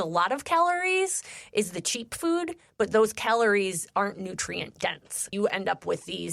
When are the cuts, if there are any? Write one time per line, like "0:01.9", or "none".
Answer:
0:05.3